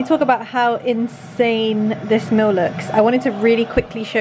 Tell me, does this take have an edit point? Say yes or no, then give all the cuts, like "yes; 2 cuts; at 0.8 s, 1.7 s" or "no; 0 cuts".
no; 0 cuts